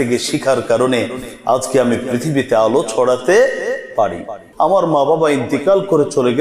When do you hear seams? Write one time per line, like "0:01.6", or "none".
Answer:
0:04.4